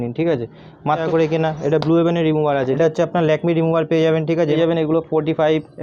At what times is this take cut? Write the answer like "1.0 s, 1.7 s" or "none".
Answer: 1.0 s, 2.8 s, 4.6 s